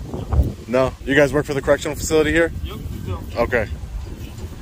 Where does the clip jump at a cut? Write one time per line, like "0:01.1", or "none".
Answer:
0:01.0